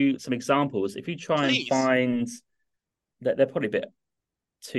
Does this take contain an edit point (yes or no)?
no